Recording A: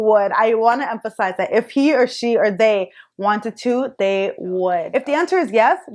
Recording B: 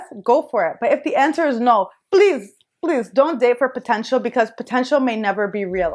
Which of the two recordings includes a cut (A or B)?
A